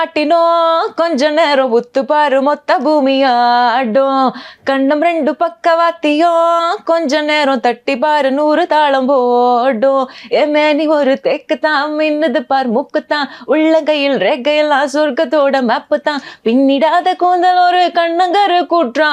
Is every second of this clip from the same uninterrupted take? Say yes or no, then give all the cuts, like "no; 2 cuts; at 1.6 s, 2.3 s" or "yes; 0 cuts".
yes; 0 cuts